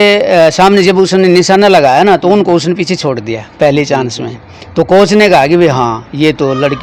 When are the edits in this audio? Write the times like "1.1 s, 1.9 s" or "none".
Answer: none